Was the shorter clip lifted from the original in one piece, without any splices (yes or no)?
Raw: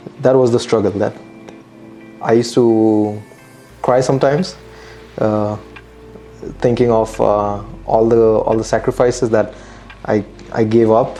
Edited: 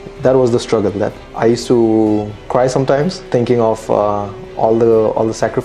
no